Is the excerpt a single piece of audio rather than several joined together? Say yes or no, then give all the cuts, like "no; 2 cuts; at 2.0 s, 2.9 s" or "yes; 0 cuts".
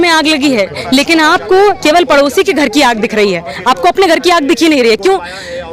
yes; 0 cuts